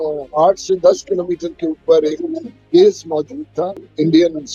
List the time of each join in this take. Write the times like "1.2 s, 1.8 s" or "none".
none